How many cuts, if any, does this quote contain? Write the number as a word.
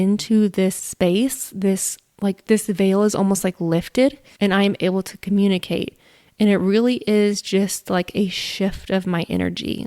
one